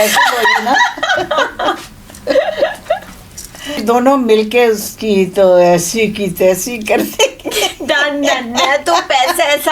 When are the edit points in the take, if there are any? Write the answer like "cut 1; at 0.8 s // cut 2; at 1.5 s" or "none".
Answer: cut 1; at 3.8 s